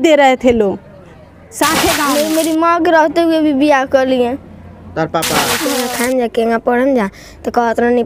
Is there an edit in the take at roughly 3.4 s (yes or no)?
no